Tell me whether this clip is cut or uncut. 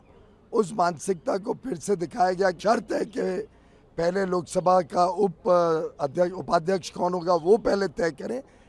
cut